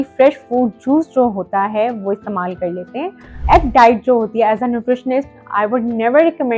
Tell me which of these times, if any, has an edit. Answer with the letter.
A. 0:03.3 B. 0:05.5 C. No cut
A